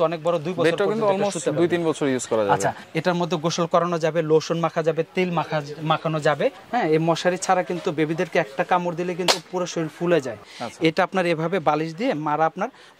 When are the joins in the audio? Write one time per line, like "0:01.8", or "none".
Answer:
0:02.8
0:06.6
0:10.4

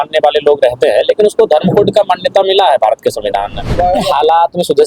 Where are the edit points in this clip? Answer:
0:03.7

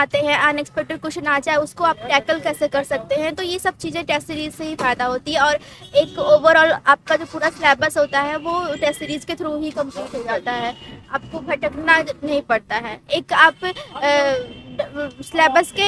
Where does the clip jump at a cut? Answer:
none

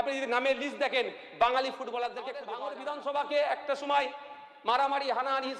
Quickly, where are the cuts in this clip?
0:02.5

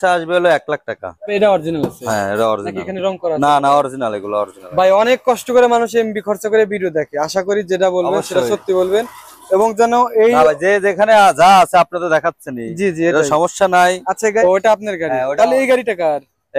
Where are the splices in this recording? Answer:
0:01.3
0:14.4

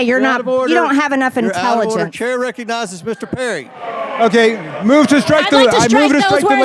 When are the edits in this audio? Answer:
none

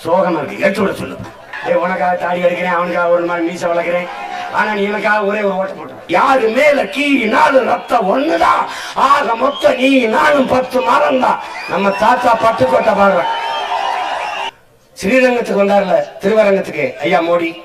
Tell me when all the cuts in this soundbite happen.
0:01.5
0:05.9
0:14.4

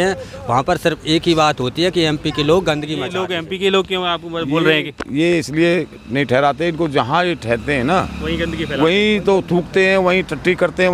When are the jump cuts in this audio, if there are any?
0:03.2

